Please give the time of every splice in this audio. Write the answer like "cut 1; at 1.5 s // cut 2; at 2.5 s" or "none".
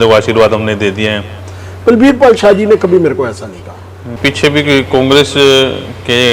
cut 1; at 4.1 s